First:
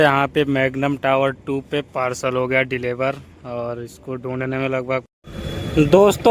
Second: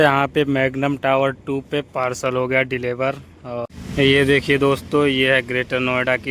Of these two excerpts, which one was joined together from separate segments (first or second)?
second